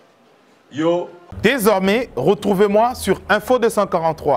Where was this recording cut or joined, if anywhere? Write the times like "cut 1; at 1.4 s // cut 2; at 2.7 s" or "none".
cut 1; at 1.2 s